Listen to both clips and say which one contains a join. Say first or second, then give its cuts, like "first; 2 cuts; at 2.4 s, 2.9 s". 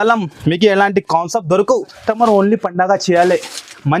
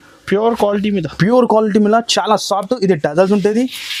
first; 1 cut; at 1.9 s